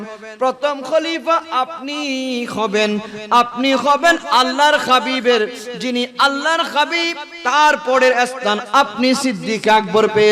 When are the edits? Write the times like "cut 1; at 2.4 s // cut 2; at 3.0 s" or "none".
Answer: none

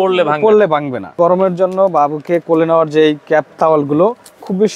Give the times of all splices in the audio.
cut 1; at 1.1 s

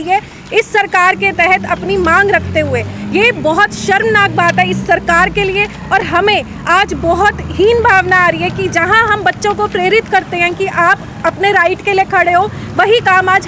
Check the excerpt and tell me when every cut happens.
none

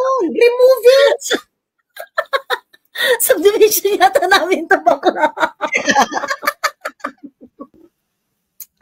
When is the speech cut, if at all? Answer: cut 1; at 7.8 s

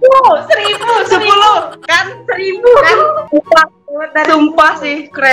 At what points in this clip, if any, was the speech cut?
cut 1; at 3.2 s

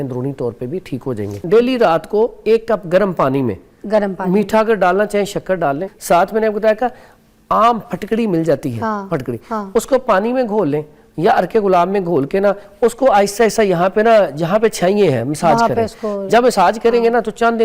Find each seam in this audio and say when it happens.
cut 1; at 1.3 s // cut 2; at 5.9 s

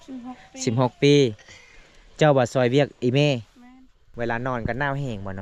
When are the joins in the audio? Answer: cut 1; at 4.1 s

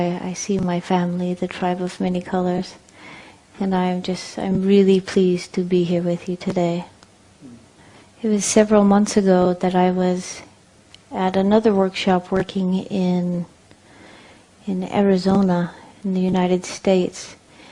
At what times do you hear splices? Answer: cut 1; at 6.9 s

